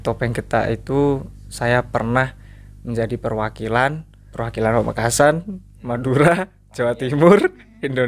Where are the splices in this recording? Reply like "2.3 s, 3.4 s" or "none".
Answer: 4.4 s

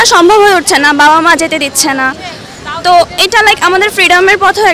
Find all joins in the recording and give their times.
none

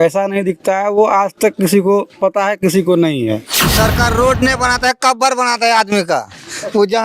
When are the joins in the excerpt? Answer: 3.6 s

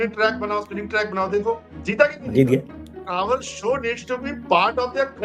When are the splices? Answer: 3.0 s

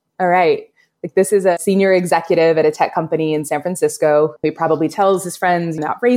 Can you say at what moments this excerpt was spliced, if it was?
4.4 s

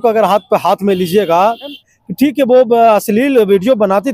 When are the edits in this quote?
1.8 s

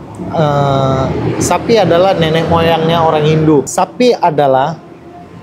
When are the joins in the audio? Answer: 3.7 s

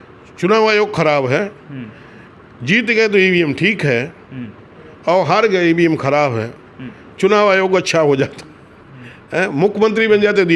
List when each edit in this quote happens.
none

